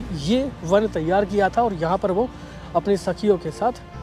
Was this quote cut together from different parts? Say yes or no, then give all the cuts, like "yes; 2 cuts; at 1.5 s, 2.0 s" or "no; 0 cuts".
no; 0 cuts